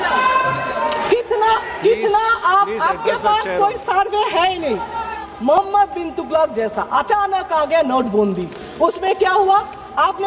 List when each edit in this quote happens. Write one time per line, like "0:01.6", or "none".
0:05.2